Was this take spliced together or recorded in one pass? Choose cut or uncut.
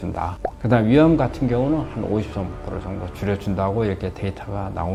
uncut